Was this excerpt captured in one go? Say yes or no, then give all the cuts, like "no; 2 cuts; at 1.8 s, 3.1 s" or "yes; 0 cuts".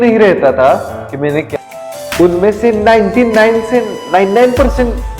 no; 1 cut; at 1.5 s